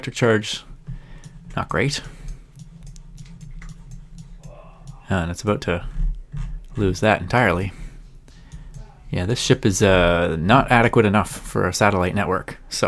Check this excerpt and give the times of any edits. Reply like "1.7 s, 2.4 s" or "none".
6.3 s